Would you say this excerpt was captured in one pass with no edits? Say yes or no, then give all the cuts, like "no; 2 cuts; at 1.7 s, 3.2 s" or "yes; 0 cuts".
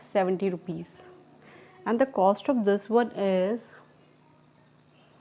yes; 0 cuts